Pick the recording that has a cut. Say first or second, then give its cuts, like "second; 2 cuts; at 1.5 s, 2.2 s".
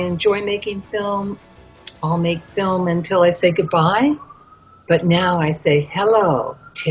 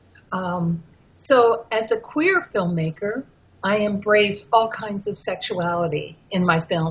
first; 1 cut; at 4.6 s